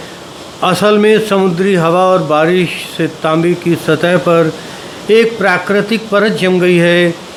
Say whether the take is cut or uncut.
uncut